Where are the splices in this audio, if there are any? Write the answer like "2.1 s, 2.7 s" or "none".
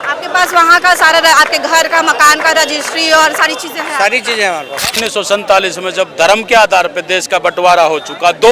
5.0 s